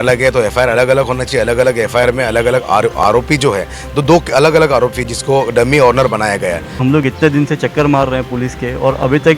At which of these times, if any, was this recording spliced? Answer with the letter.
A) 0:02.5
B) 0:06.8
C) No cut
B